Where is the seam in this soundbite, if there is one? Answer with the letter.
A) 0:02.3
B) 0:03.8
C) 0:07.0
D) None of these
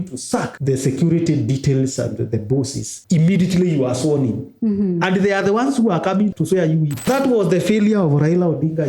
C